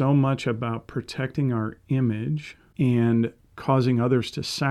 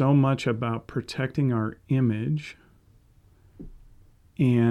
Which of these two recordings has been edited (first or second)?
first